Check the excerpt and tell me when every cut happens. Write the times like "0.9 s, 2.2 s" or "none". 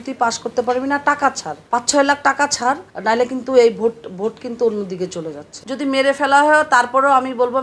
1.5 s, 2.9 s, 5.4 s